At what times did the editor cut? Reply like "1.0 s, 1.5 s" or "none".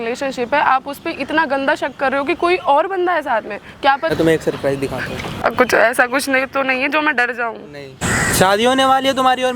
4.1 s, 5.4 s, 8.0 s